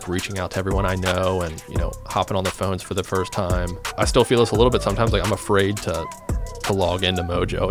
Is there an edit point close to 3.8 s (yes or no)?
yes